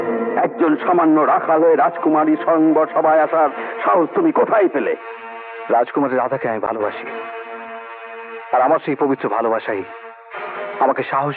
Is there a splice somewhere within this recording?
no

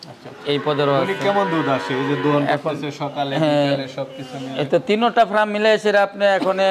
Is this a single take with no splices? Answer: yes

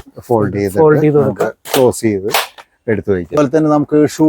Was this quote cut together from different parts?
yes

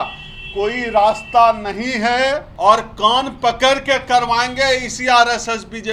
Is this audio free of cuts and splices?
no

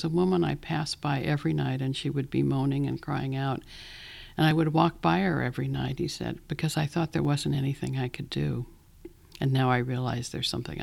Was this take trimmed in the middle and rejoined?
no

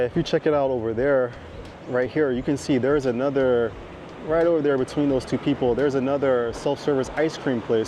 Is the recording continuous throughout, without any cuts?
yes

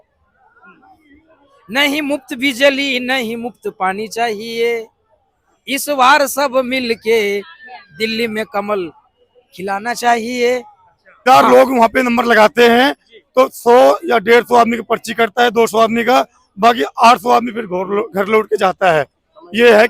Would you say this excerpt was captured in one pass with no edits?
no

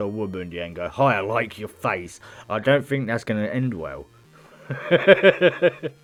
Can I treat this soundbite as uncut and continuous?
yes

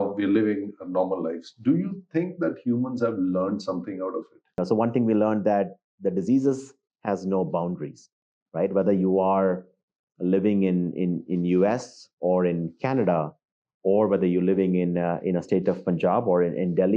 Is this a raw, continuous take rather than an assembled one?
no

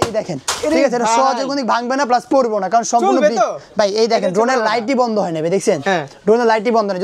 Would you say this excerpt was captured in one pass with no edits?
yes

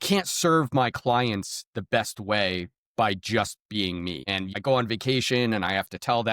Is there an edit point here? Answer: yes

